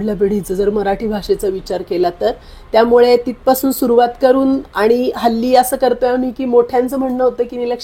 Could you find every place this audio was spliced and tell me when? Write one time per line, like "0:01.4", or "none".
none